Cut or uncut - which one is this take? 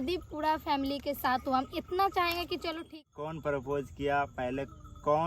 cut